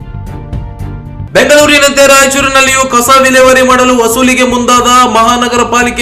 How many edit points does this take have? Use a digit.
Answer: 1